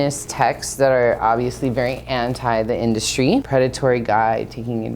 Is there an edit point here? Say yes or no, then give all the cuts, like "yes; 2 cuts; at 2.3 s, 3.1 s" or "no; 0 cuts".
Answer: yes; 1 cut; at 3.5 s